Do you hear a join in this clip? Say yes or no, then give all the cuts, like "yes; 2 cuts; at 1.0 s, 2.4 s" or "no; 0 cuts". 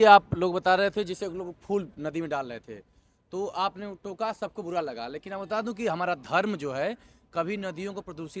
no; 0 cuts